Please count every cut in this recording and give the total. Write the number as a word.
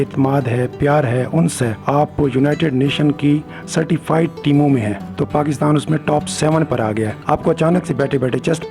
three